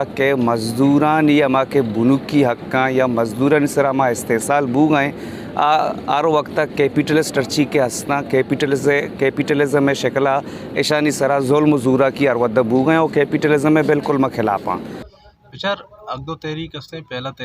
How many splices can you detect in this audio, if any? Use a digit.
1